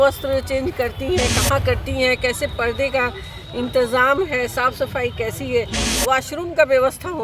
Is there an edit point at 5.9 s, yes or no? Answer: yes